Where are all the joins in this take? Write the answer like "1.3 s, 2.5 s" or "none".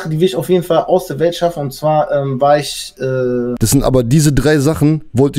3.6 s

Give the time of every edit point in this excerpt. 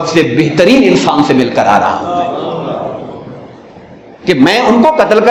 none

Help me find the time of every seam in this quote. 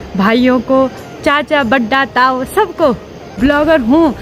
3.2 s

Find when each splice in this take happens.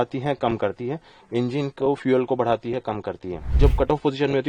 3.6 s

